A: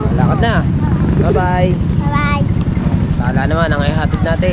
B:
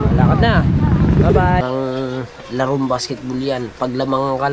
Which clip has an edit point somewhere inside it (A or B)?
B